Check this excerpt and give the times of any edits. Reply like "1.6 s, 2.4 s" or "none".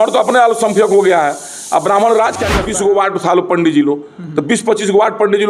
2.6 s